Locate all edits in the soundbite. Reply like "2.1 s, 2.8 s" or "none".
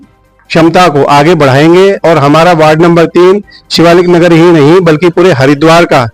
none